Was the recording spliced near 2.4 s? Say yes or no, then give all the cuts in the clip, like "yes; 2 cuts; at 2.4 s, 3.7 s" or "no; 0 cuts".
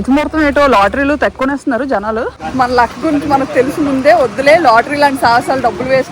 yes; 1 cut; at 2.4 s